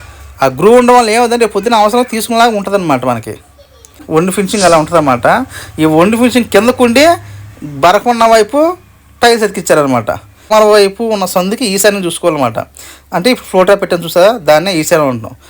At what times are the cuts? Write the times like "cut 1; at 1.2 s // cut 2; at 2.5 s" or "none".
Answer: cut 1; at 4.0 s // cut 2; at 10.5 s